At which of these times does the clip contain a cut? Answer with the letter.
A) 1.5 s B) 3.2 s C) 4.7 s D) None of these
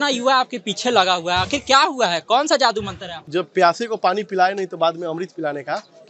B